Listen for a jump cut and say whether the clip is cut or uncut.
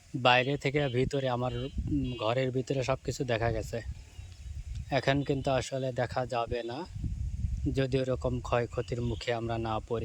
uncut